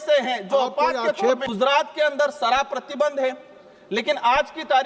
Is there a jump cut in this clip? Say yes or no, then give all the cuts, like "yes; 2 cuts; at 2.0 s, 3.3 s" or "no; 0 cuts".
yes; 1 cut; at 1.5 s